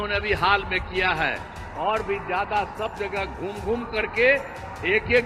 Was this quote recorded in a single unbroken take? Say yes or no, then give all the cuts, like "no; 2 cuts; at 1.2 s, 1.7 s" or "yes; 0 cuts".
yes; 0 cuts